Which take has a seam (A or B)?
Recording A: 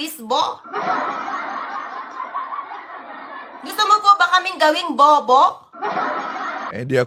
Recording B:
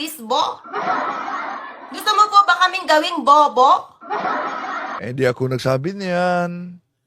B